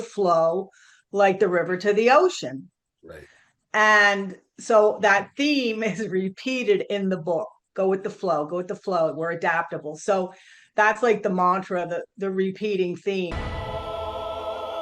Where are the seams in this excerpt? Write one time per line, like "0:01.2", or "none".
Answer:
0:13.3